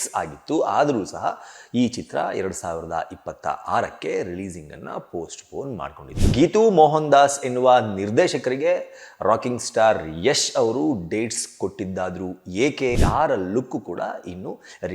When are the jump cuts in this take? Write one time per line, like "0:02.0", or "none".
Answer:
0:06.1
0:13.0